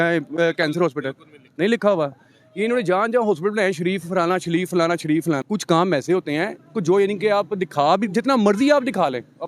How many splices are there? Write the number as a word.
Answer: one